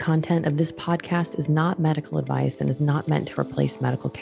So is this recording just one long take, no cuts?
yes; 0 cuts

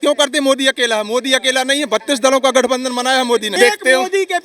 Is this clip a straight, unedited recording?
no; 1 cut; at 3.5 s

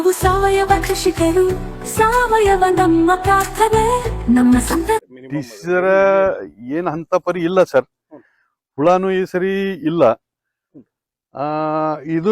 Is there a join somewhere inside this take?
yes; 1 cut; at 5.0 s

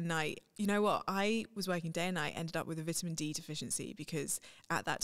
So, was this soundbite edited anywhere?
no; 0 cuts

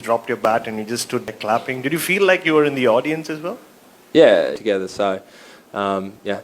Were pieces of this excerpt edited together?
yes; 2 cuts; at 1.3 s, 4.6 s

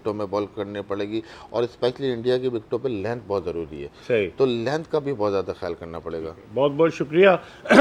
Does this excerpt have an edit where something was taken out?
no; 0 cuts

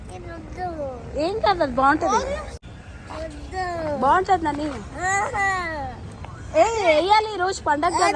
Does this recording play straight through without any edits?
no; 1 cut; at 2.6 s

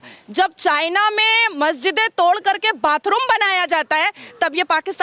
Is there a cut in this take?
no; 0 cuts

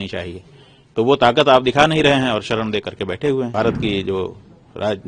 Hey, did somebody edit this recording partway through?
yes; 1 cut; at 3.5 s

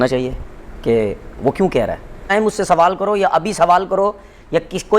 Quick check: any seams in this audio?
yes; 1 cut; at 2.3 s

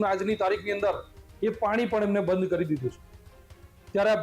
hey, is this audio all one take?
yes; 0 cuts

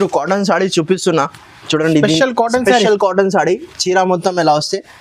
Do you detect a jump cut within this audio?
no; 0 cuts

